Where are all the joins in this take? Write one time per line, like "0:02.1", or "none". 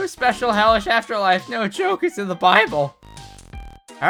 none